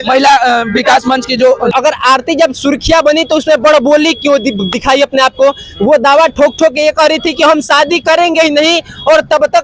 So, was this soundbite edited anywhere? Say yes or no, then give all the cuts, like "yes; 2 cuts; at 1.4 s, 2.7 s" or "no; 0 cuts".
yes; 1 cut; at 1.7 s